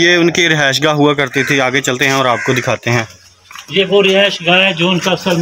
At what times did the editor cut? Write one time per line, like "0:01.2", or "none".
none

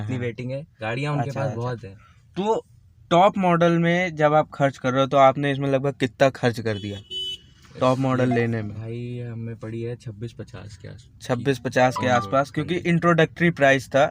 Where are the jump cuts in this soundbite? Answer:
none

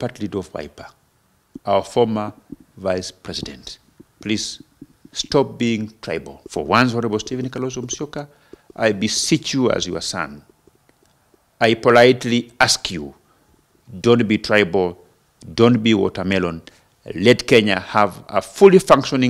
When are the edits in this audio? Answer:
0:06.4

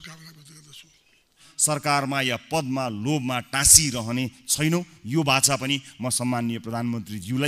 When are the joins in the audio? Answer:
0:01.5

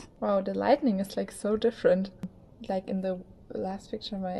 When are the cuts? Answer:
0:02.4

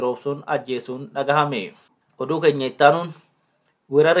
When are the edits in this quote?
0:02.1

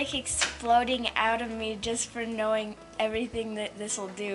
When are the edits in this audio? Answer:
none

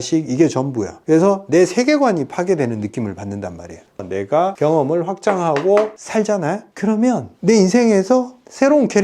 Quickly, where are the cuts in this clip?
0:04.0
0:06.0

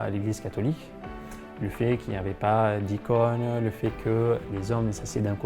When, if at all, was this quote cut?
0:01.4

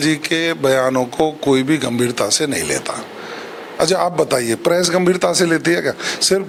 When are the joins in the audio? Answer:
none

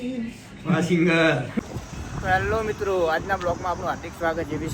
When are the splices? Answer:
0:01.5

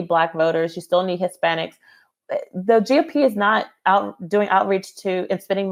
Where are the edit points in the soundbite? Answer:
none

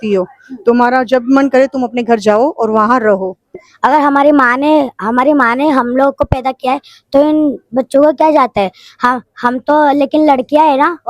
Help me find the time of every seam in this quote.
0:03.4

